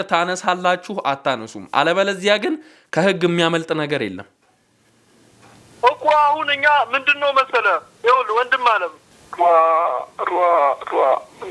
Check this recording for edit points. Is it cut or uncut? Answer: cut